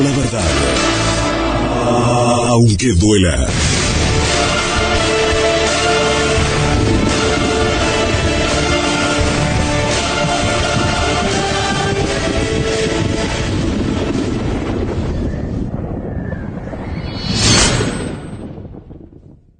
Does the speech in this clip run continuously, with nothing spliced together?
no; 1 cut; at 16.2 s

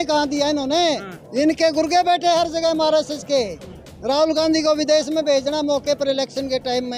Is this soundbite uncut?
yes; 0 cuts

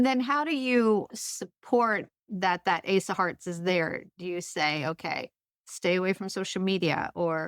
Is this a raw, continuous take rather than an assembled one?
no; 2 cuts; at 1.1 s, 2.2 s

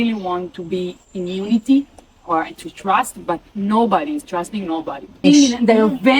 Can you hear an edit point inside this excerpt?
yes; 2 cuts; at 1.0 s, 5.2 s

